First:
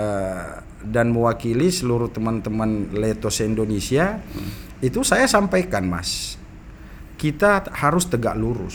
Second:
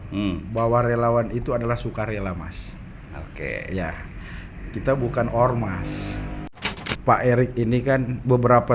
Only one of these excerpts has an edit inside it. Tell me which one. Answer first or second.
second